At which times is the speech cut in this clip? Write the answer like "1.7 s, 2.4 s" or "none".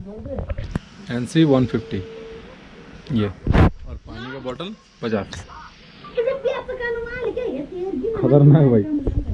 none